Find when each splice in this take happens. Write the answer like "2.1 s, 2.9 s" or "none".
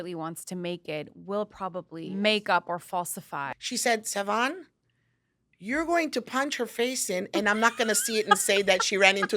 2.1 s, 3.4 s